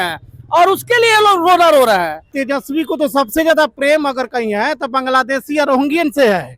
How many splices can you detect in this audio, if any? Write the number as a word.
one